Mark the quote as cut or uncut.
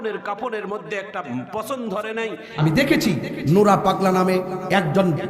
cut